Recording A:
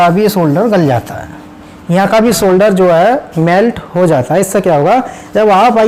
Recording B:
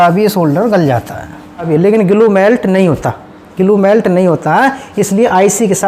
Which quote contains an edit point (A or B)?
B